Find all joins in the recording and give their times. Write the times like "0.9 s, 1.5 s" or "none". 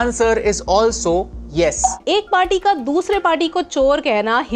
2.0 s